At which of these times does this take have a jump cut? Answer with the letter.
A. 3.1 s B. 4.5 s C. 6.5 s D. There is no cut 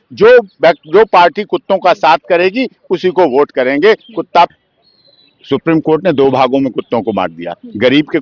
B